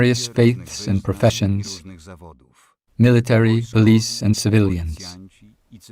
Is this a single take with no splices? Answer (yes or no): no